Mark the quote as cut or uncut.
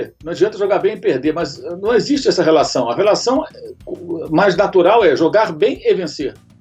uncut